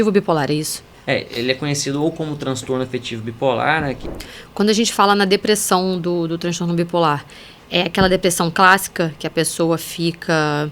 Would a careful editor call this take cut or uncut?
cut